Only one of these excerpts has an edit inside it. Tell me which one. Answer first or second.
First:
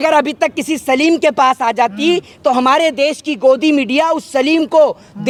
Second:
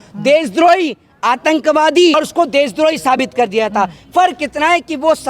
second